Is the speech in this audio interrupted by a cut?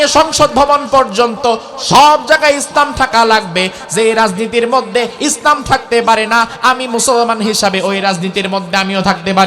no; 0 cuts

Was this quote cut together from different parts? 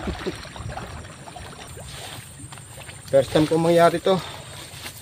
yes; 1 cut; at 1.7 s

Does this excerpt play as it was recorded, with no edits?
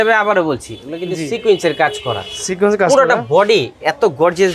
yes; 0 cuts

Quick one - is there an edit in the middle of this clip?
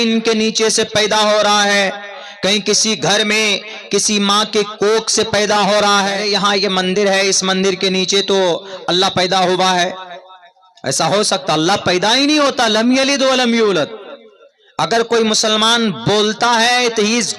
yes; 1 cut; at 6.2 s

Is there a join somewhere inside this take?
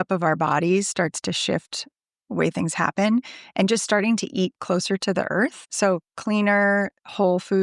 yes; 1 cut; at 5.6 s

